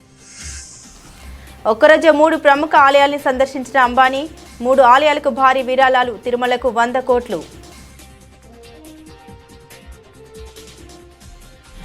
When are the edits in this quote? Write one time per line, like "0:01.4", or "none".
0:01.6
0:07.5